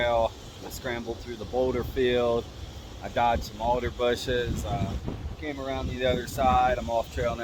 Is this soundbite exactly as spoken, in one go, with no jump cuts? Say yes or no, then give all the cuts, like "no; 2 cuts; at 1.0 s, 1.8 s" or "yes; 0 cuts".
yes; 0 cuts